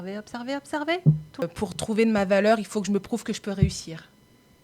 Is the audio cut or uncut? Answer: cut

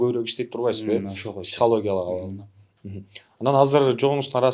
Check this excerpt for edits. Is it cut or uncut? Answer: uncut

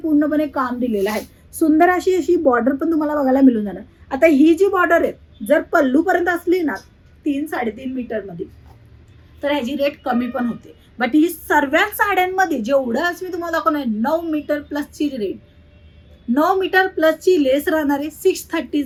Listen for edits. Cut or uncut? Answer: uncut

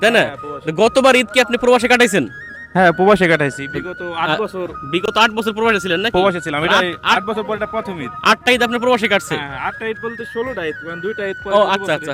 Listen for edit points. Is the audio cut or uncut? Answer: uncut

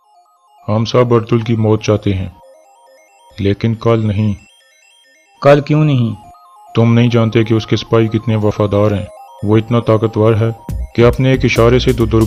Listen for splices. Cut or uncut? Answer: uncut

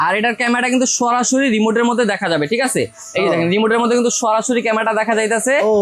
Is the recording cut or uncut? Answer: uncut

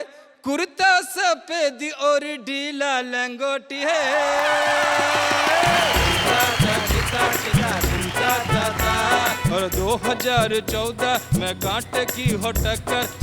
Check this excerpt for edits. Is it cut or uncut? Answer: cut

